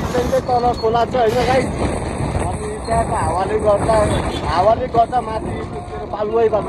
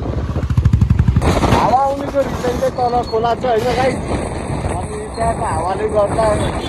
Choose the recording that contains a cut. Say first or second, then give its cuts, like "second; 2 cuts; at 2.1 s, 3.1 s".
second; 1 cut; at 1.2 s